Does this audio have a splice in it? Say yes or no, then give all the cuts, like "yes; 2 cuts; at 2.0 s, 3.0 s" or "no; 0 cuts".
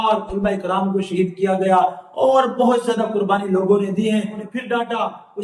yes; 1 cut; at 4.4 s